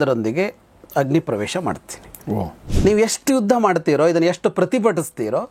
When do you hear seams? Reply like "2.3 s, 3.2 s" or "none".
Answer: 2.6 s